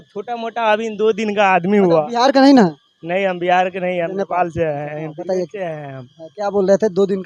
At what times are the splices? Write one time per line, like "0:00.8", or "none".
none